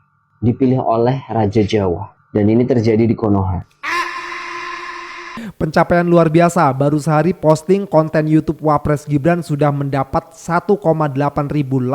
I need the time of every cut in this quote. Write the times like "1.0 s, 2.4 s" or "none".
2.1 s, 5.4 s